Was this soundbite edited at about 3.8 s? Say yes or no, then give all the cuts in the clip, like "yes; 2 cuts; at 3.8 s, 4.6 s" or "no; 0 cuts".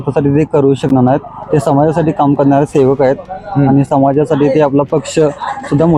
no; 0 cuts